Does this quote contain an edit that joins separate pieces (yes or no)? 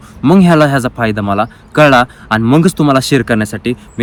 no